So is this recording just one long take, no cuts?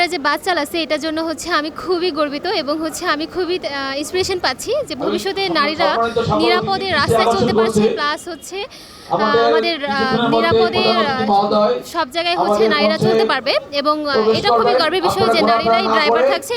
yes; 0 cuts

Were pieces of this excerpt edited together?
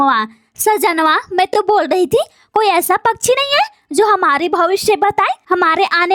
no; 0 cuts

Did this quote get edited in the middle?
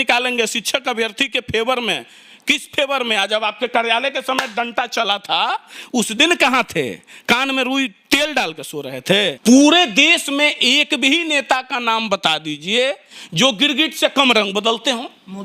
yes; 1 cut; at 9.4 s

